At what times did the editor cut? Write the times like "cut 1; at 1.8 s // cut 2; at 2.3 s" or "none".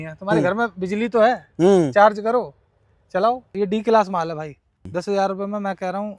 cut 1; at 3.5 s // cut 2; at 4.9 s

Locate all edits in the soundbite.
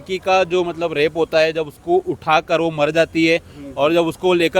none

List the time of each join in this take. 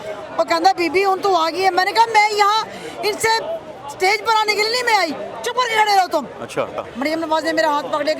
cut 1; at 6.8 s

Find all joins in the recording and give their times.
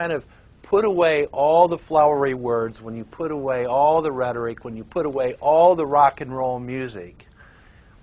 cut 1; at 4.3 s

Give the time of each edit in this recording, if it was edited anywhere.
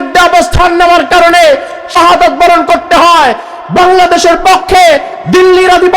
cut 1; at 1.9 s

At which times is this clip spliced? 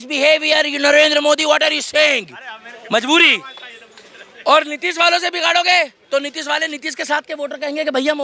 none

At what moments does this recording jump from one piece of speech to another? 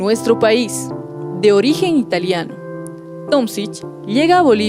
cut 1; at 1.4 s

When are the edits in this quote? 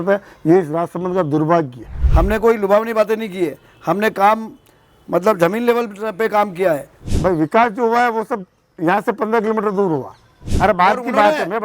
cut 1; at 2.0 s // cut 2; at 7.1 s // cut 3; at 10.4 s

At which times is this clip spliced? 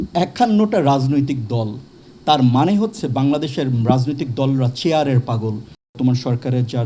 cut 1; at 5.9 s

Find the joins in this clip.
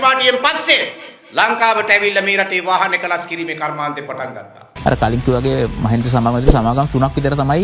cut 1; at 4.6 s

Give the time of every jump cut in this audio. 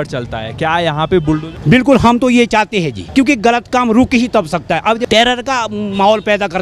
cut 1; at 1.5 s // cut 2; at 3.0 s // cut 3; at 5.0 s

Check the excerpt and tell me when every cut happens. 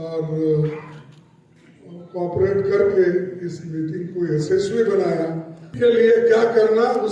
cut 1; at 5.7 s

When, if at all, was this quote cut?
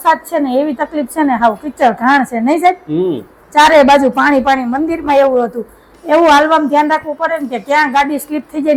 none

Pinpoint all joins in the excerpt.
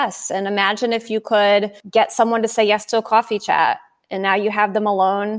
cut 1; at 1.8 s

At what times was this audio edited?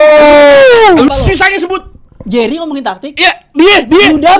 cut 1; at 1.1 s

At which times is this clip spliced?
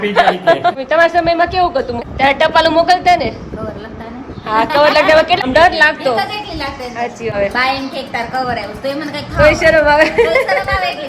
cut 1; at 0.8 s // cut 2; at 2.0 s // cut 3; at 5.4 s // cut 4; at 7.3 s

